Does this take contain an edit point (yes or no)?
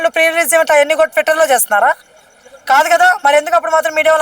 no